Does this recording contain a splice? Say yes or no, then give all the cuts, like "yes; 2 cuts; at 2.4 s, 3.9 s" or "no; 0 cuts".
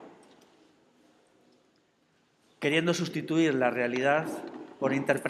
no; 0 cuts